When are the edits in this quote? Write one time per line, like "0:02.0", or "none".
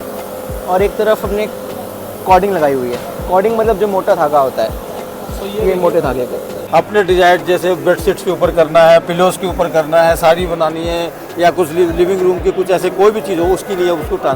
0:06.6